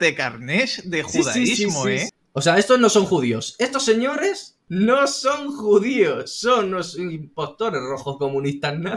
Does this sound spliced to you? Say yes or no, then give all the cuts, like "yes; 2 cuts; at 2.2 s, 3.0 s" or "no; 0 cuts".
yes; 2 cuts; at 2.1 s, 4.6 s